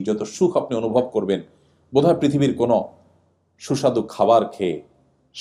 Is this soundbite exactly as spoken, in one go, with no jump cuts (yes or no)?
yes